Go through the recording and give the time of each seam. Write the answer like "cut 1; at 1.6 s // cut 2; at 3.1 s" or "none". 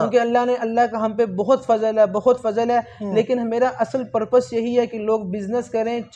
none